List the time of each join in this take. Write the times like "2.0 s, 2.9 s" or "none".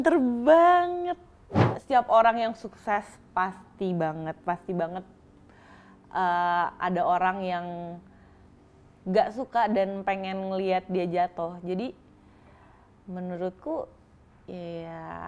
1.7 s